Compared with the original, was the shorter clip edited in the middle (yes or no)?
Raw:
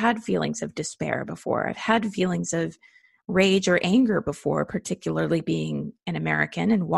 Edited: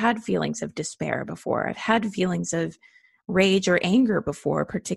no